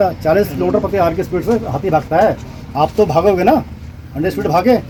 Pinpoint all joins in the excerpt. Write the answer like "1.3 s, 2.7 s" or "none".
none